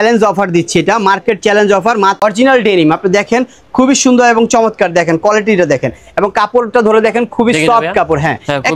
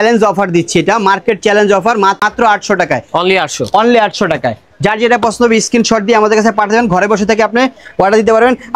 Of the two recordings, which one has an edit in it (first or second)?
first